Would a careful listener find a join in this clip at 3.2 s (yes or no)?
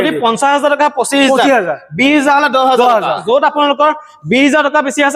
yes